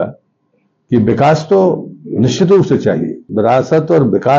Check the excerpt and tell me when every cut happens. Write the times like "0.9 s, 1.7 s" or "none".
3.2 s